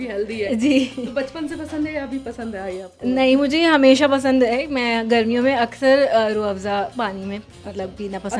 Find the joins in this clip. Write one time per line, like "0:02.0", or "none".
none